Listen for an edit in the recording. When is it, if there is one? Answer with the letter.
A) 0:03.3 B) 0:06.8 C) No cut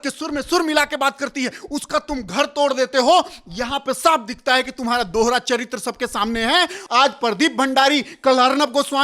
B